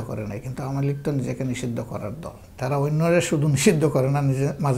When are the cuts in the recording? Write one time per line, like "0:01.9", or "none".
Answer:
0:02.4